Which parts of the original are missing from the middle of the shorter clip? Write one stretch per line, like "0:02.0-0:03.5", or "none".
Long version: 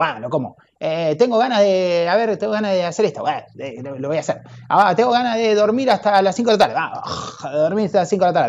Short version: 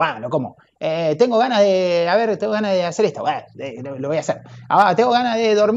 none